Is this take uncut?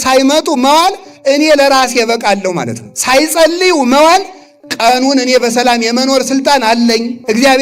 yes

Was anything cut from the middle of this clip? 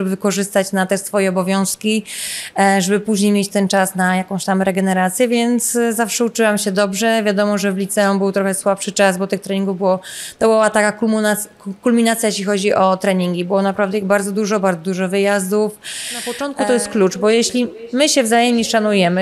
yes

